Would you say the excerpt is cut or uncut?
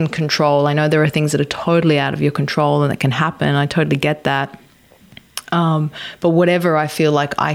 uncut